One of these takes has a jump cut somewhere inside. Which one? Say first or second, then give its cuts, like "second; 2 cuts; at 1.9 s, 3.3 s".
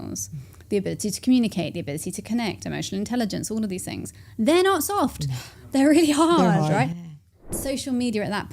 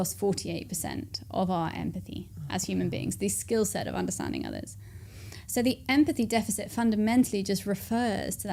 first; 1 cut; at 7.6 s